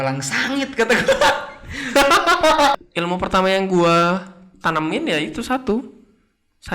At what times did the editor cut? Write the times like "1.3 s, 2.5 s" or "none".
2.7 s